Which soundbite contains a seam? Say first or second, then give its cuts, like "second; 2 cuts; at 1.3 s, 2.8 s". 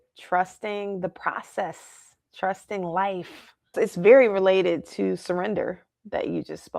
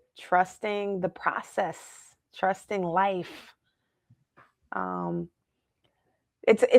first; 1 cut; at 3.7 s